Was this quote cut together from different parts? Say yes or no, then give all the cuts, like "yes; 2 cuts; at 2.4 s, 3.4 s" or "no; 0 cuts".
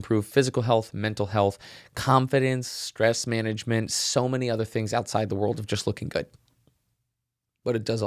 no; 0 cuts